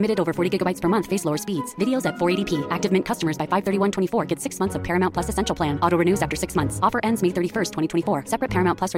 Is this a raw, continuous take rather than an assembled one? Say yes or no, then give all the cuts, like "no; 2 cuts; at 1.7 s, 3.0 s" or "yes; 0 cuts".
yes; 0 cuts